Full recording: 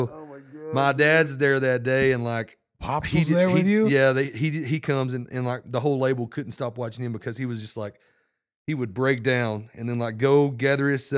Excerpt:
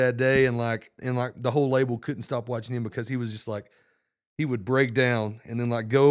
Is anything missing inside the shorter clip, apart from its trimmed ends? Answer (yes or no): yes